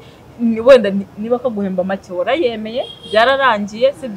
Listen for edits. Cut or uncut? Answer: uncut